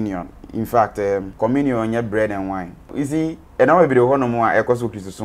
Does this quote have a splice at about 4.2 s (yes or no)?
no